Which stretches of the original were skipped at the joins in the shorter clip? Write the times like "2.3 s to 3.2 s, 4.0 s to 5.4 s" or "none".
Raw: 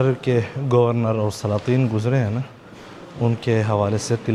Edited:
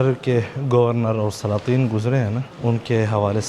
2.5 s to 3.0 s